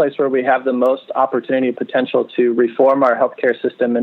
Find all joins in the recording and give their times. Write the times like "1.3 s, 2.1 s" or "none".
none